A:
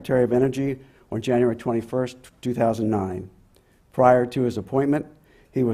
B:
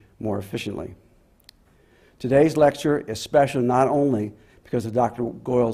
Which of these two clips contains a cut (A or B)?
A